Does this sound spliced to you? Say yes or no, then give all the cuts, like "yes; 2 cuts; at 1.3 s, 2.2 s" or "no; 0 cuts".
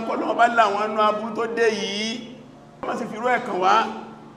no; 0 cuts